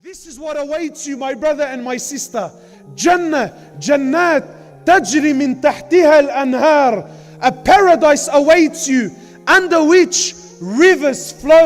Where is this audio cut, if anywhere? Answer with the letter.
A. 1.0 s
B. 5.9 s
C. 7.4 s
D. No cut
D